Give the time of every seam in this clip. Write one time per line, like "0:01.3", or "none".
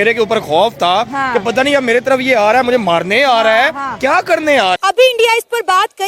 0:04.8